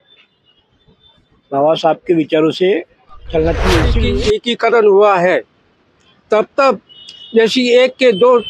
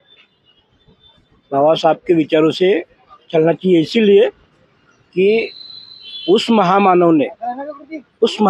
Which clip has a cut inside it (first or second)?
first